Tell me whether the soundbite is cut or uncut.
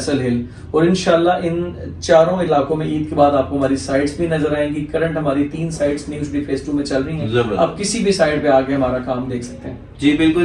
uncut